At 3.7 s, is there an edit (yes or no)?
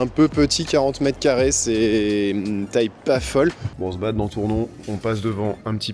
yes